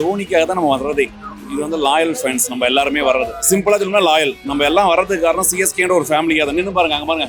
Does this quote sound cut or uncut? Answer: uncut